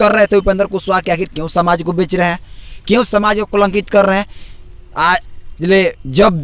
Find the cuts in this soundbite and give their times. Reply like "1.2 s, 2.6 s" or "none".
none